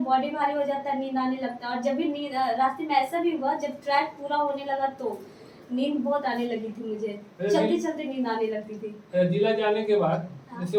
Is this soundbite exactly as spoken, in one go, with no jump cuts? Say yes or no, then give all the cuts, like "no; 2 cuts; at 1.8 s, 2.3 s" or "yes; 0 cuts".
yes; 0 cuts